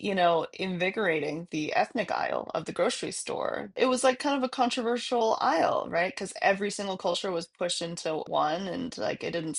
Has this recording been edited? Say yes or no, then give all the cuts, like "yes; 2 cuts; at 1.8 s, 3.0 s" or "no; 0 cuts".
yes; 2 cuts; at 3.7 s, 8.3 s